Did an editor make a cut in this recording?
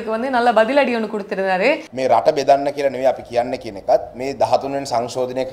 yes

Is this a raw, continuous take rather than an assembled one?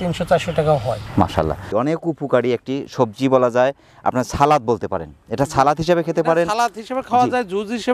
no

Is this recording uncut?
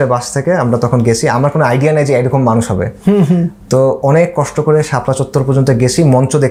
yes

